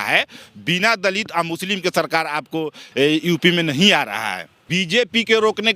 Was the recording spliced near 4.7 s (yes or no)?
yes